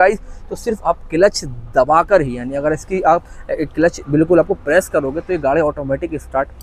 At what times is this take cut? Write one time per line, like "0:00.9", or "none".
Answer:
none